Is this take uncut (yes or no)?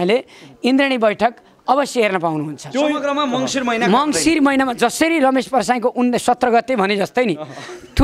yes